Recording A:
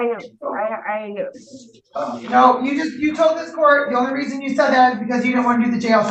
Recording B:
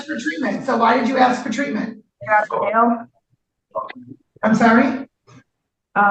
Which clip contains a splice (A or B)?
B